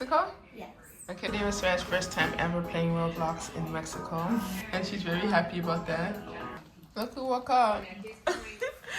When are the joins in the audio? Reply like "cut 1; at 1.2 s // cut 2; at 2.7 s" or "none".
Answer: cut 1; at 1.2 s // cut 2; at 4.6 s // cut 3; at 6.6 s